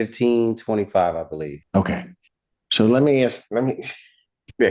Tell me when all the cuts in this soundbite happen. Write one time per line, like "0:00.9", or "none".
0:01.6